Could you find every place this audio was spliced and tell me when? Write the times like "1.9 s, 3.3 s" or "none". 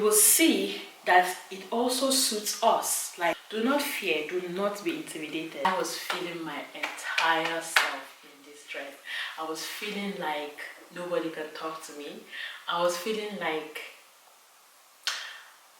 3.4 s, 5.6 s